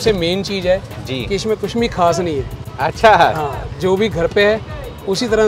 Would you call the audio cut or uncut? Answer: uncut